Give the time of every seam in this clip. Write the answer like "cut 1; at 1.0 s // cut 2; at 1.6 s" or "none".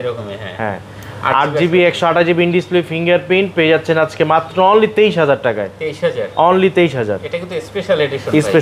none

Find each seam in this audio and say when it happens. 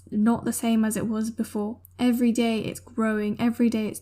cut 1; at 1.8 s

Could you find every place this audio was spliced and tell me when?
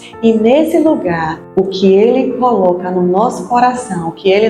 cut 1; at 1.4 s

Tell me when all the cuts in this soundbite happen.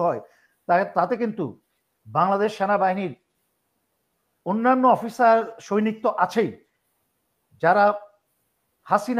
none

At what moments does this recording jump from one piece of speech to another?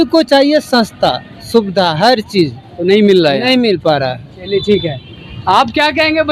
none

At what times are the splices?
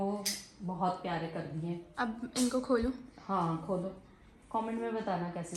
none

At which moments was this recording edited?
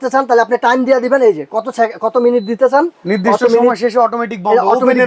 none

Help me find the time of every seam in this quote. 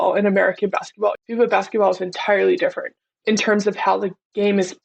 cut 1; at 1.2 s // cut 2; at 3.1 s

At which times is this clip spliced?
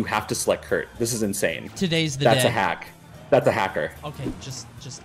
cut 1; at 4.1 s

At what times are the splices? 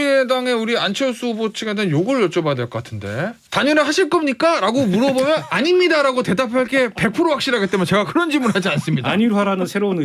cut 1; at 3.4 s

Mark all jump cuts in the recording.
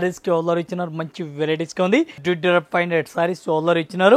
cut 1; at 2.2 s

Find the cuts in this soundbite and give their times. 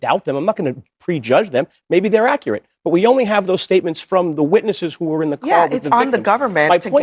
none

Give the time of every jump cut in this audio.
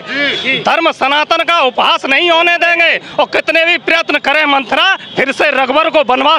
none

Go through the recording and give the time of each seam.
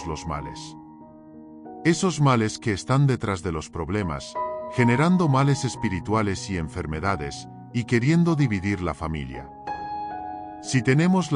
none

